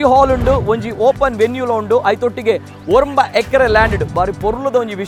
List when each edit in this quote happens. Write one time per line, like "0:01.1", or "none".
none